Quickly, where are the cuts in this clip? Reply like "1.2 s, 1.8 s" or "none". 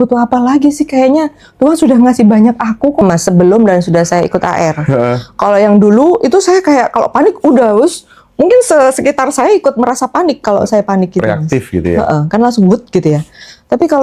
3.0 s